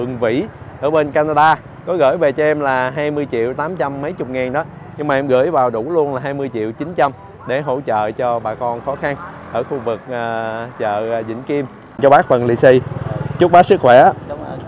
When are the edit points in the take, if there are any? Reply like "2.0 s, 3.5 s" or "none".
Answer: 12.0 s